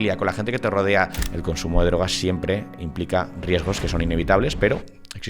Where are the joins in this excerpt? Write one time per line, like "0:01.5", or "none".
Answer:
0:01.2